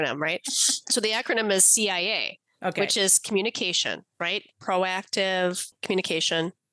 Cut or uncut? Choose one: cut